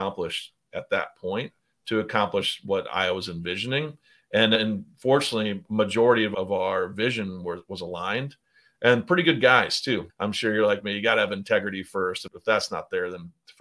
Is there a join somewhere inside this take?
yes; 5 cuts; at 2.6 s, 4.6 s, 6.3 s, 10.1 s, 12.2 s

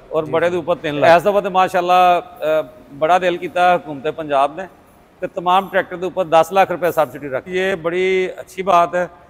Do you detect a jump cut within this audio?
yes; 2 cuts; at 1.0 s, 7.5 s

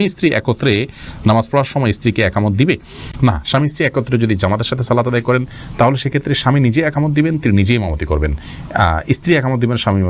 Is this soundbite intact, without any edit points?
yes; 0 cuts

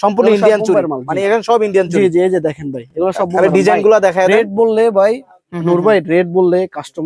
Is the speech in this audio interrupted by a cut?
no; 0 cuts

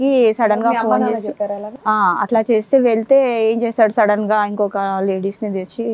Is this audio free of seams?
yes; 0 cuts

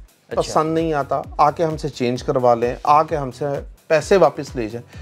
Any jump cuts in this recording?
no; 0 cuts

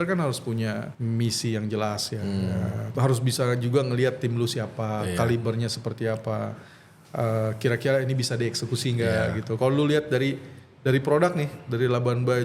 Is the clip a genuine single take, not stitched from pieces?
no; 2 cuts; at 0.9 s, 2.9 s

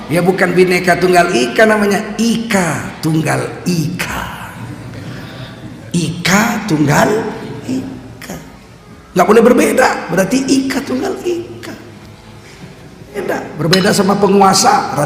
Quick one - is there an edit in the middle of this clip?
yes; 1 cut; at 13.2 s

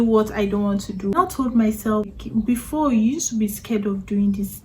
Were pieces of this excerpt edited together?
yes; 2 cuts; at 1.1 s, 2.1 s

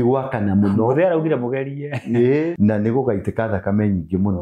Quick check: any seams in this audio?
yes; 1 cut; at 2.5 s

